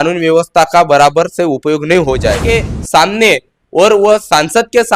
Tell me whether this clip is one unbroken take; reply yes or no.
no